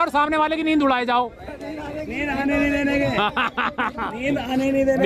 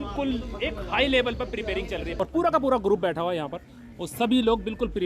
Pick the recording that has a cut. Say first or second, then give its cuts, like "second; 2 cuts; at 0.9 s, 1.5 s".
second; 1 cut; at 2.1 s